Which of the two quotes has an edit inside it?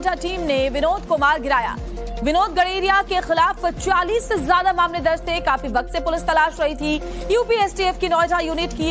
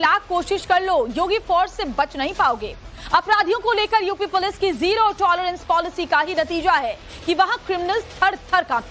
second; 1 cut; at 3.6 s

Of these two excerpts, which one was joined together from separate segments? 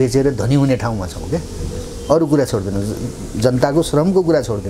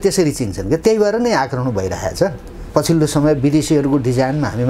second; 1 cut; at 2.6 s

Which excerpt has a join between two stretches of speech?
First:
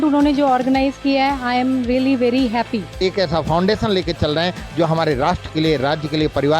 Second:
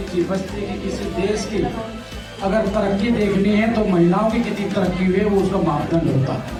first; 1 cut; at 2.9 s

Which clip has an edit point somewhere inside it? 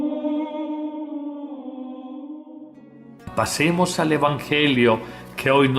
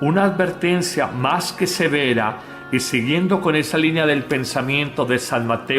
first; 1 cut; at 2.9 s

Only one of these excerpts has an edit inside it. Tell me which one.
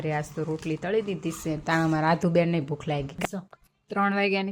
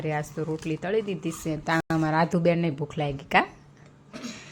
first; 2 cuts; at 1.8 s, 3.2 s

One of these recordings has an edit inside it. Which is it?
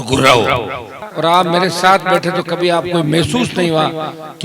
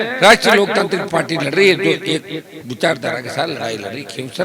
first; 1 cut; at 1.0 s

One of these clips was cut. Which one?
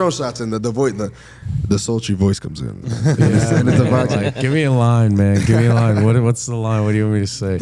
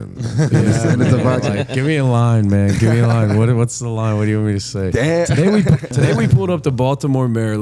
second; 1 cut; at 5.9 s

